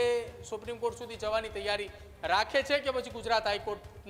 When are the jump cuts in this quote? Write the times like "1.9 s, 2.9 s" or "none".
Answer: none